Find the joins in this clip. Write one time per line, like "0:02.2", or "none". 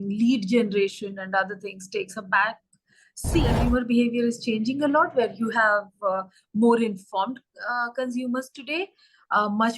0:03.5